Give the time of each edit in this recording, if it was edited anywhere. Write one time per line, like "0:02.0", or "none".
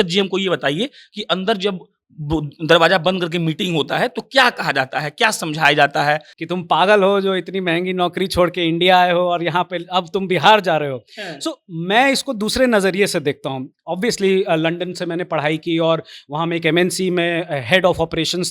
0:06.3